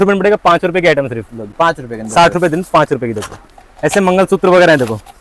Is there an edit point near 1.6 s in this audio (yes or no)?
no